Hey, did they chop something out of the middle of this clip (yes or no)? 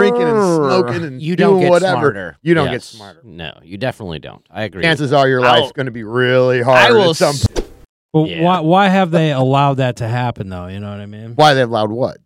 yes